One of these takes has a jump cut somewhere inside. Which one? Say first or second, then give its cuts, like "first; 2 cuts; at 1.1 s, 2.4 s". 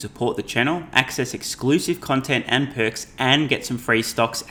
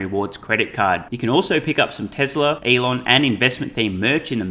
second; 1 cut; at 2.6 s